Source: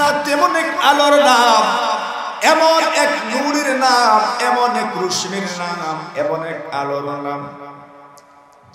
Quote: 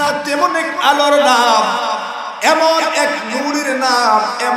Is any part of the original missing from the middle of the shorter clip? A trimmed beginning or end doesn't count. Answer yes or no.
no